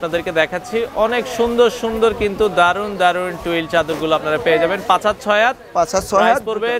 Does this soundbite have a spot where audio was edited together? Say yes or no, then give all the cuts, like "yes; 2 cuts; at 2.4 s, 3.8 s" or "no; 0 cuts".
no; 0 cuts